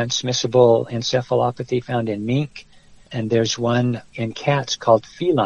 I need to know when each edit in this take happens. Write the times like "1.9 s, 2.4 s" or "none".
3.1 s